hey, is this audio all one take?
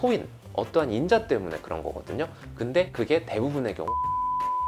yes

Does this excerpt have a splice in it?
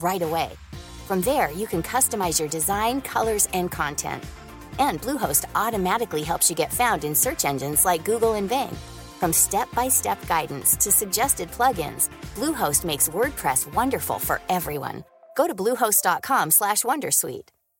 no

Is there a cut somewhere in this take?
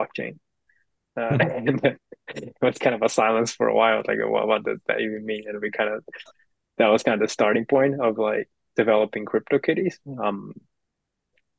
no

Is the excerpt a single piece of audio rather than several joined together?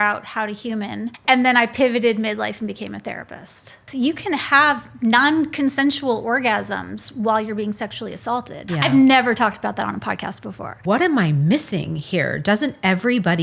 no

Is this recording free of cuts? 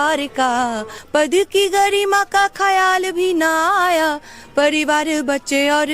no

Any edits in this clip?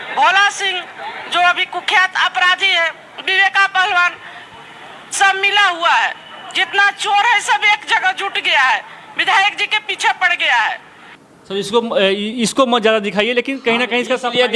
no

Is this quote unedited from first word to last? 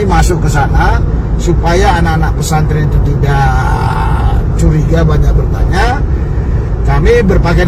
yes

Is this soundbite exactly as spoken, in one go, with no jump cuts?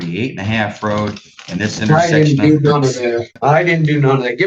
no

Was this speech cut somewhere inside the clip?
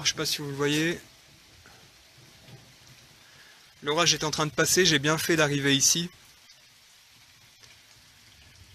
yes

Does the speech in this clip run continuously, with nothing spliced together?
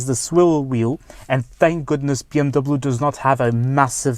yes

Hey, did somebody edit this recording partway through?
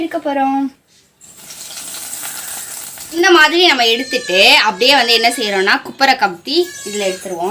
yes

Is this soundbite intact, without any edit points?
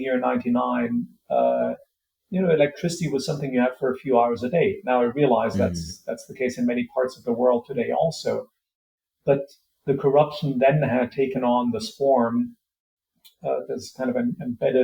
yes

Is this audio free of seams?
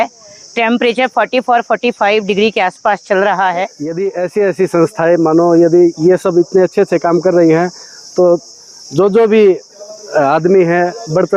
no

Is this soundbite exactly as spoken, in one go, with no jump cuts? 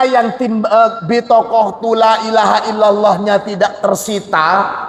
yes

